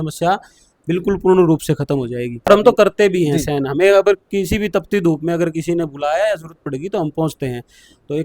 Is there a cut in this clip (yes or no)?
yes